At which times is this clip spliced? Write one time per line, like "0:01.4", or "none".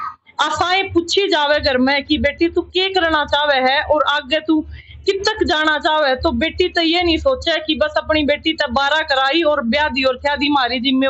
none